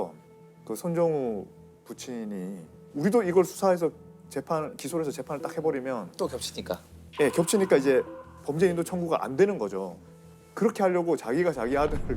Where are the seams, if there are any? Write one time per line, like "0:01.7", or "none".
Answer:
none